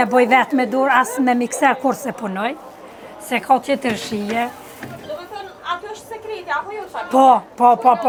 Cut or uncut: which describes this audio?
uncut